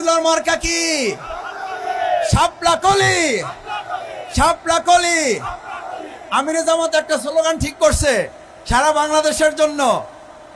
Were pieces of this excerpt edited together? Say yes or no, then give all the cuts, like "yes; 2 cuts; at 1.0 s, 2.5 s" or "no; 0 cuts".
no; 0 cuts